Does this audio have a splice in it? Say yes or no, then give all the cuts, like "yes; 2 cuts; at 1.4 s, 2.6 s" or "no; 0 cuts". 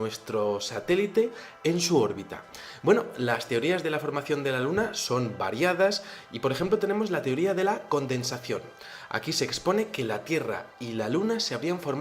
yes; 1 cut; at 1.8 s